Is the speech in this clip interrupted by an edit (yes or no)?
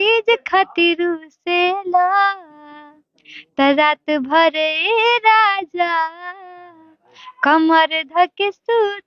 no